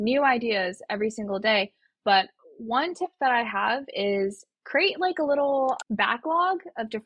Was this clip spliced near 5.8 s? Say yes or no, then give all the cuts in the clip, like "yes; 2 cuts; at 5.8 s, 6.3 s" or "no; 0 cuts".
yes; 1 cut; at 5.8 s